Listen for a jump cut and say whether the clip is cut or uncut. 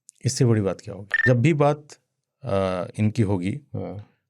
cut